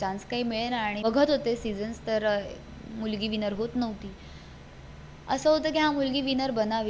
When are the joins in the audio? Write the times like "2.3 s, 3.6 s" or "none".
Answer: 1.0 s